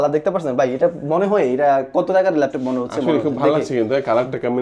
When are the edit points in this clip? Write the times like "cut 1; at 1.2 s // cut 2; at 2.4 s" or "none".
none